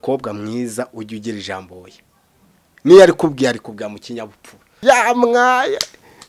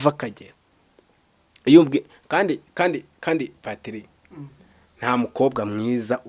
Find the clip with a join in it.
first; 1 cut; at 4.7 s

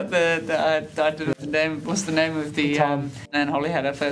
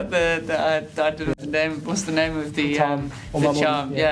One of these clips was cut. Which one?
first; 1 cut; at 3.2 s

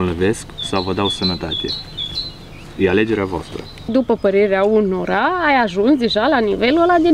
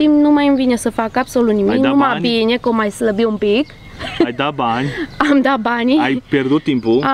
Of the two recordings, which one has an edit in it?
first; 1 cut; at 3.9 s

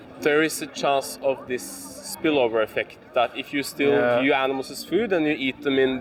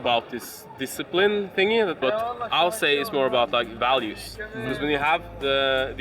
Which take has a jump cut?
second; 1 cut; at 2.0 s

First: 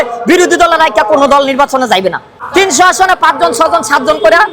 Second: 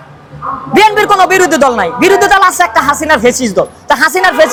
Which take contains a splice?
first; 1 cut; at 2.3 s

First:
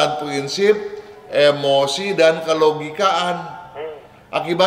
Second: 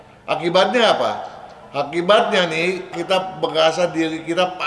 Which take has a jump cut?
second; 1 cut; at 2.9 s

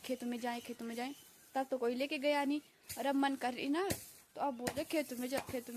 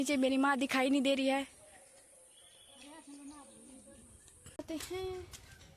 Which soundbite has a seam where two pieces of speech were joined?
second; 1 cut; at 4.6 s

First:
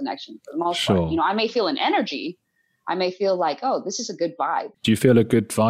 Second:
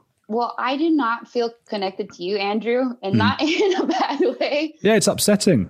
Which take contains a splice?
first; 1 cut; at 4.7 s

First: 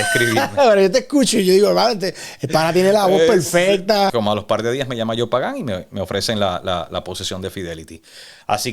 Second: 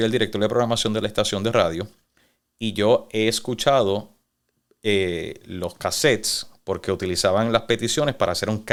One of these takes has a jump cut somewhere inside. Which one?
first; 1 cut; at 4.1 s

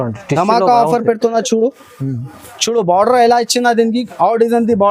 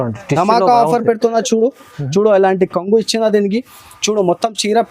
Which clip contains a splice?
second; 1 cut; at 1.9 s

